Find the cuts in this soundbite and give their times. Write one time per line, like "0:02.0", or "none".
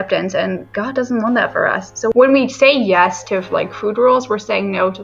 0:02.1